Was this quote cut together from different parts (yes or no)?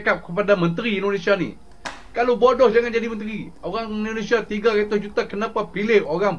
no